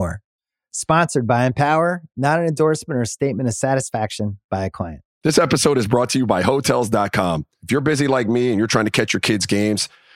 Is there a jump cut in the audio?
yes; 1 cut; at 5.0 s

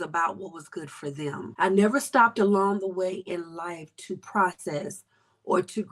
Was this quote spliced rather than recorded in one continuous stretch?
yes; 1 cut; at 1.5 s

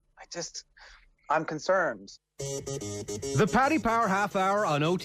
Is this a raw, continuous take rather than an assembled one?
no; 1 cut; at 2.1 s

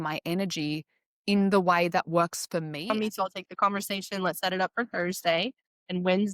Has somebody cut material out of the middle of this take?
yes; 1 cut; at 2.9 s

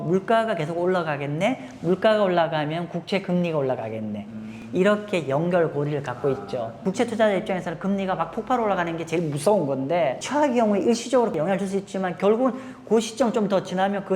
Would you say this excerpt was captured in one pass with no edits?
no; 3 cuts; at 6.7 s, 10.2 s, 11.3 s

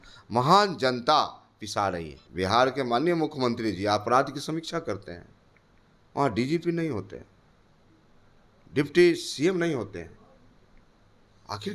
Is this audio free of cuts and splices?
no; 1 cut; at 2.2 s

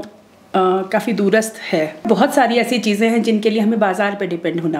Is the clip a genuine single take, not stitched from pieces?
no; 1 cut; at 2.0 s

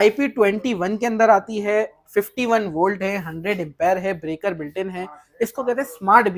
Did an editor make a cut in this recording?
no; 0 cuts

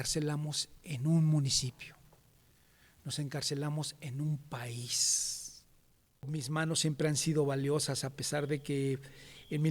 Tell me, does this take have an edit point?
yes; 1 cut; at 6.3 s

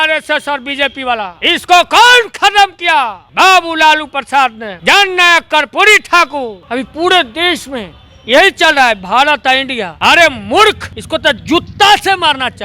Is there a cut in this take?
yes; 6 cuts; at 1.3 s, 3.2 s, 4.7 s, 6.6 s, 9.8 s, 10.9 s

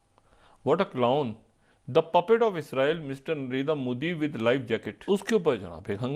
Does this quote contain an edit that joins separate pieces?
yes; 1 cut; at 5.0 s

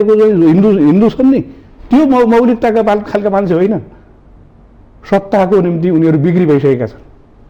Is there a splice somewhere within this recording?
no; 0 cuts

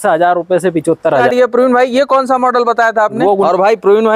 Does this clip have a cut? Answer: yes; 2 cuts; at 1.3 s, 3.4 s

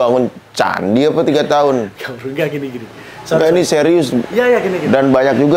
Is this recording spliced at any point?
no; 0 cuts

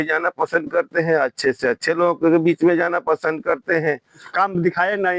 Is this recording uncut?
no; 1 cut; at 4.3 s

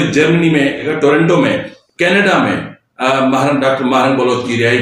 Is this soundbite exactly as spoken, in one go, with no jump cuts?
no; 2 cuts; at 0.8 s, 1.8 s

